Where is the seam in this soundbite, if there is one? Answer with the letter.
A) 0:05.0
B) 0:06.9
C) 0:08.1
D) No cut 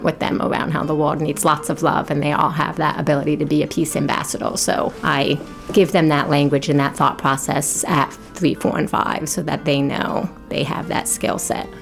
A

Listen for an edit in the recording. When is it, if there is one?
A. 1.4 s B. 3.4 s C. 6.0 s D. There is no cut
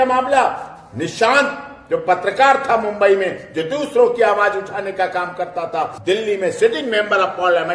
C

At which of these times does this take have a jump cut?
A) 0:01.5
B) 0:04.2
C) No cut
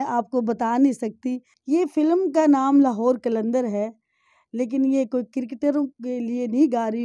A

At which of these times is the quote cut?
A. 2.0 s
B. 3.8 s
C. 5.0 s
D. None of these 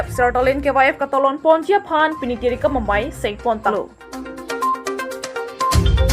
B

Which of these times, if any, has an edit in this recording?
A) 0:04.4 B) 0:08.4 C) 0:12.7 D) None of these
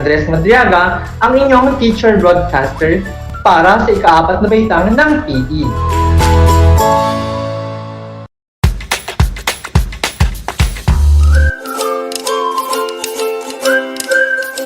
B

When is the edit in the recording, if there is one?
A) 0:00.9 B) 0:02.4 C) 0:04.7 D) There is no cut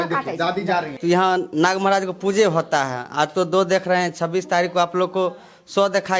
A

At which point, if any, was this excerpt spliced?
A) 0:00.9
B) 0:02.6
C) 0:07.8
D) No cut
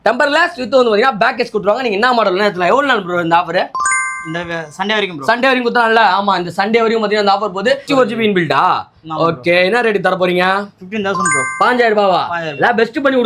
C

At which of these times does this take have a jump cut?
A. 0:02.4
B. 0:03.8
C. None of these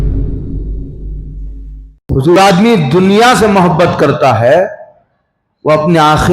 A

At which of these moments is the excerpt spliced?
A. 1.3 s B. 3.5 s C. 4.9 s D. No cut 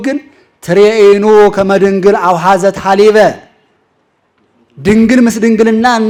D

